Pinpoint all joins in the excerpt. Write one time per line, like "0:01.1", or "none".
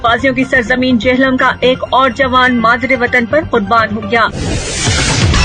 0:04.3